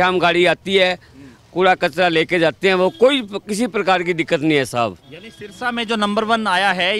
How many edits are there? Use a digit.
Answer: 0